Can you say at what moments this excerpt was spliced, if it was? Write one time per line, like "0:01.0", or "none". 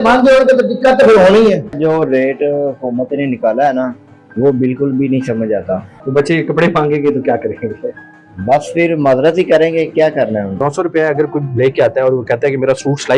0:01.8
0:05.9
0:10.6